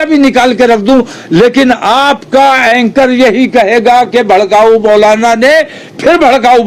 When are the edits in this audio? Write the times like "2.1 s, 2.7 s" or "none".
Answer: none

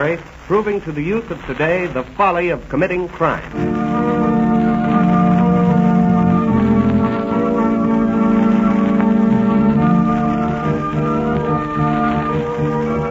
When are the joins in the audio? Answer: 5.2 s

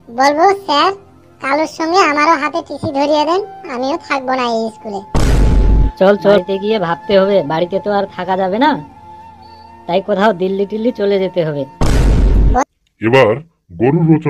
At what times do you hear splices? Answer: 12.6 s

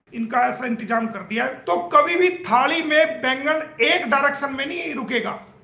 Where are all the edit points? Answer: 1.6 s

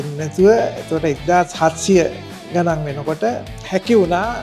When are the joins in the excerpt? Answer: none

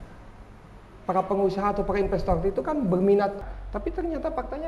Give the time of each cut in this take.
3.5 s

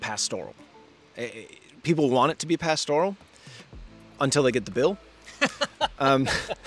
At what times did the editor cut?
none

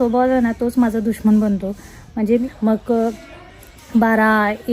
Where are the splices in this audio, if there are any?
2.3 s

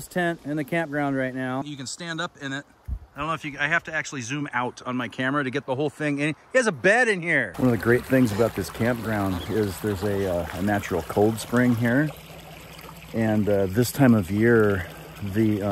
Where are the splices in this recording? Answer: 1.7 s, 7.5 s

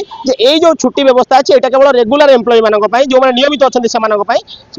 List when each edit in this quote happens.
none

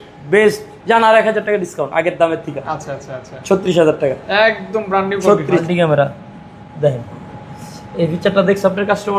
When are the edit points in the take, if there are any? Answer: 5.6 s

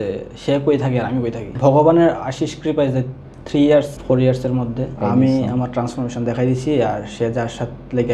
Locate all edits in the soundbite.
1.5 s, 4.0 s, 5.0 s

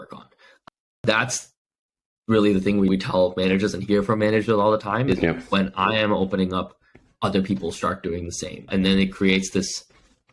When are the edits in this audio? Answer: 0.9 s, 2.9 s, 5.1 s

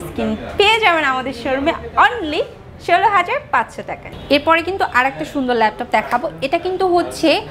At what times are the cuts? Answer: none

